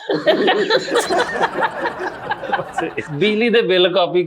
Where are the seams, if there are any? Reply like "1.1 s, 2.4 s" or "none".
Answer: 3.1 s